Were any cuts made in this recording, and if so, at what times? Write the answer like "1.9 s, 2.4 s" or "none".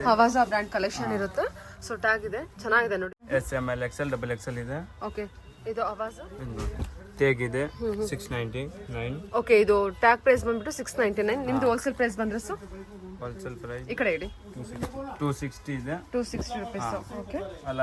3.1 s, 6.2 s